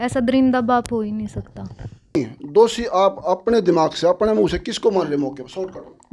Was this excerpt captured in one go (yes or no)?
no